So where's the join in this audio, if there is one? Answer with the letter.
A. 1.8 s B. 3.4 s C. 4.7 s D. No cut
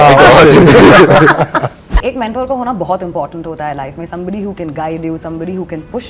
A